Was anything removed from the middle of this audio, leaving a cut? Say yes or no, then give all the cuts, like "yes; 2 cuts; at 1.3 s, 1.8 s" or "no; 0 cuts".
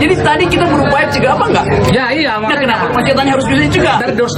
no; 0 cuts